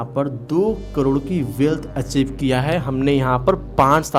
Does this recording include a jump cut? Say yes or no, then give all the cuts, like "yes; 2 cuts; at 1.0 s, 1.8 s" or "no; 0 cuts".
no; 0 cuts